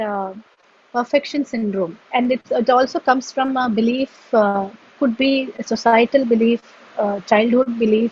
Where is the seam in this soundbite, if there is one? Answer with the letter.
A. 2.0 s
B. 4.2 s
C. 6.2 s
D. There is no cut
A